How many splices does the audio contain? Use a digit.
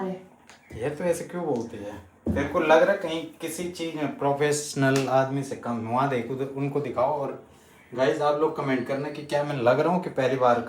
0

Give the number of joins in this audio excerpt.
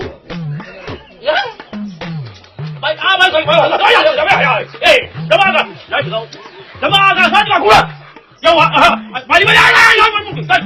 1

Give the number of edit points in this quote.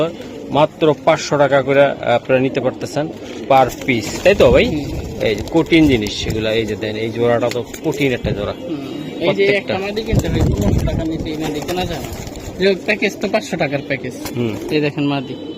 0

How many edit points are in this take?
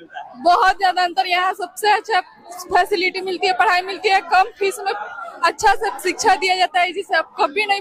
0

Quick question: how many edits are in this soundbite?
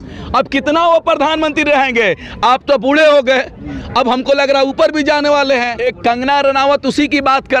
1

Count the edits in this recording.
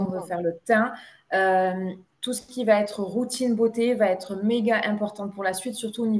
0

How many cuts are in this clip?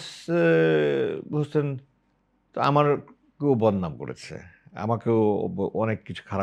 0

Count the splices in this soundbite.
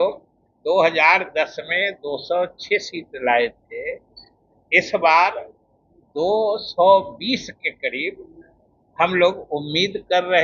0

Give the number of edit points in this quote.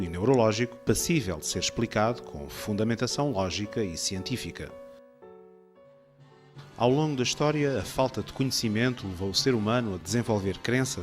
1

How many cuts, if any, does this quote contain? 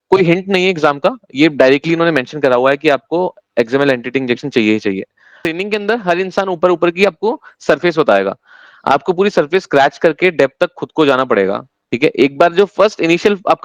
1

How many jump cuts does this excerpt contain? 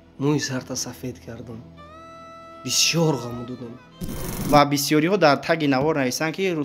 1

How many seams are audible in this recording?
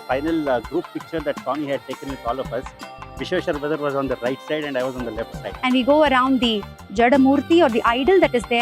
1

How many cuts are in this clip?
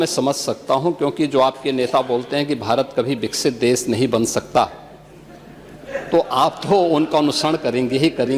0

